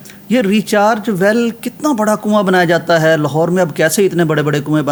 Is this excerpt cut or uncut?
uncut